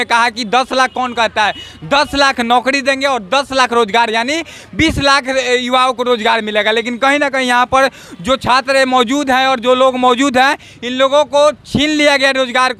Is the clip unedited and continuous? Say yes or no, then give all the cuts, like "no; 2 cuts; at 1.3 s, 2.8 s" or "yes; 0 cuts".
yes; 0 cuts